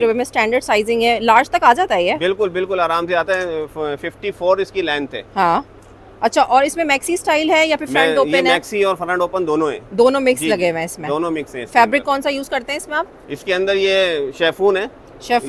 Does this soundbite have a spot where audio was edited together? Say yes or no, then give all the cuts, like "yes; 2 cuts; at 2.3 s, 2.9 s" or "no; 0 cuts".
no; 0 cuts